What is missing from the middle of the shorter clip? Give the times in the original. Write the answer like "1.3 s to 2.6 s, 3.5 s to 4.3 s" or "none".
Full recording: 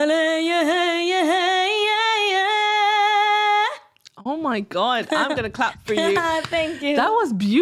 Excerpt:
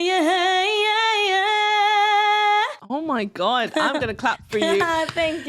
3.8 s to 4.1 s